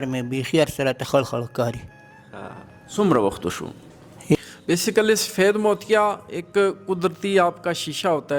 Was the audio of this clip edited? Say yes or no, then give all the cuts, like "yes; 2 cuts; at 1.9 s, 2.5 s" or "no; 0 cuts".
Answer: yes; 1 cut; at 4.3 s